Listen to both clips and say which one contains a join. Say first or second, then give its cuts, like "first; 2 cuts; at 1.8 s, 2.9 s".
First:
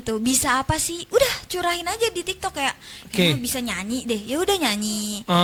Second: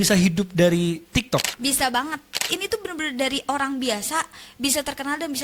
second; 2 cuts; at 1.5 s, 2.5 s